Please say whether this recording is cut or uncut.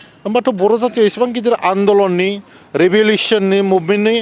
uncut